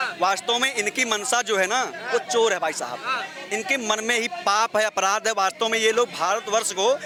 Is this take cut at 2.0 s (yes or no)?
no